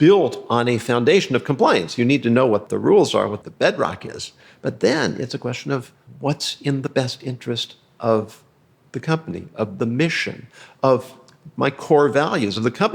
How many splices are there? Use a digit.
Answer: 3